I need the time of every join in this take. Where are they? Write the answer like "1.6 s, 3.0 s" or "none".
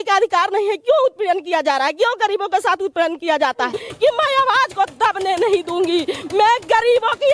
3.8 s